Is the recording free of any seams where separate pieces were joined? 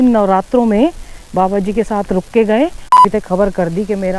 no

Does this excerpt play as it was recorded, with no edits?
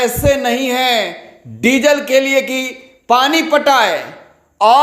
yes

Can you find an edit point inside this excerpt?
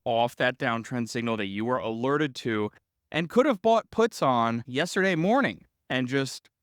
no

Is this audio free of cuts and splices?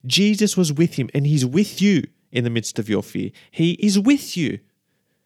yes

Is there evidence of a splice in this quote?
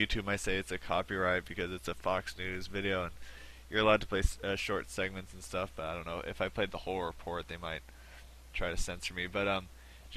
yes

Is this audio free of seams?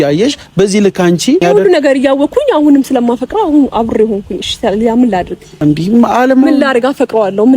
no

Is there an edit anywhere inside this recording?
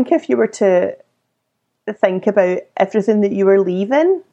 no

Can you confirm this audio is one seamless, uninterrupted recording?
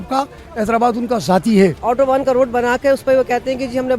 no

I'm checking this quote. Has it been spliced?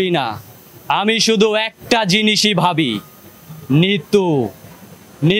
no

